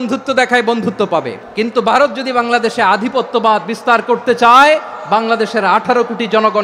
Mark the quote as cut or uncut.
cut